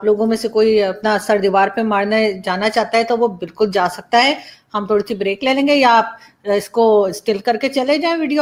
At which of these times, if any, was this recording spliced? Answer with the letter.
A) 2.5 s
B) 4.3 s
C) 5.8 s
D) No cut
D